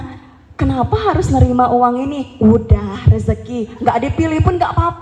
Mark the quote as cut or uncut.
uncut